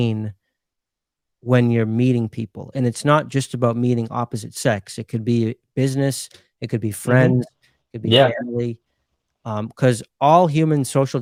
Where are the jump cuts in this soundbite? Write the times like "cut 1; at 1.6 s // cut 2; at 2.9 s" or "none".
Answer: none